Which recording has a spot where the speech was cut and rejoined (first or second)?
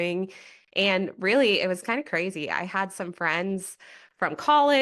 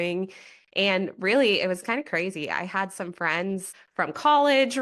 second